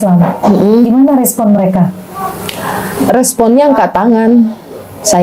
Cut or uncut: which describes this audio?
uncut